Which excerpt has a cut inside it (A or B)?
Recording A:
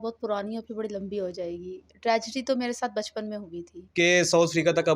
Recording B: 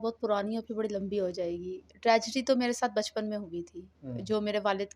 A